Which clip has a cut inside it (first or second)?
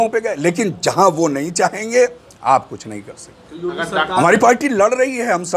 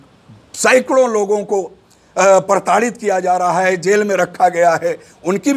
first